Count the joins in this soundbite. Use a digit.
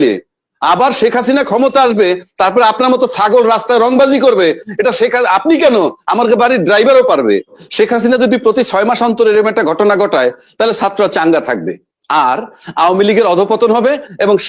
1